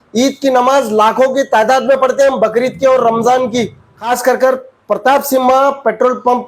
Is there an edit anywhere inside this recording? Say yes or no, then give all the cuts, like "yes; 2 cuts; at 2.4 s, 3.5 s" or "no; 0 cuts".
yes; 1 cut; at 3.9 s